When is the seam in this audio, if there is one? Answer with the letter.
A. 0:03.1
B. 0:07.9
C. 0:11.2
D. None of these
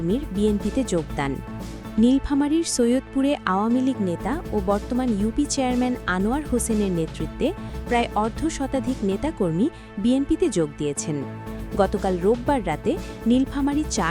D